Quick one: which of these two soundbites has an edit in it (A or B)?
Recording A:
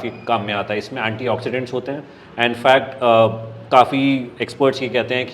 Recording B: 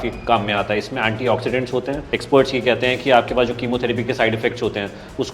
B